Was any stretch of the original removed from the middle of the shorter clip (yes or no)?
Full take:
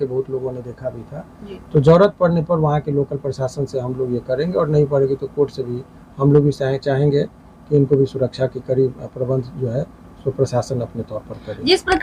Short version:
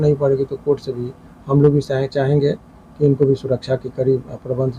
no